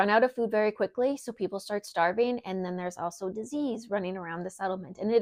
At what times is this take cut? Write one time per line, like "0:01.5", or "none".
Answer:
none